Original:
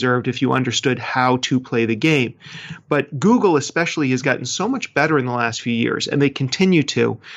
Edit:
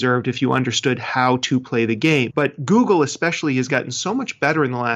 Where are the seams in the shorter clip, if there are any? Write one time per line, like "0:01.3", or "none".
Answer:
0:02.3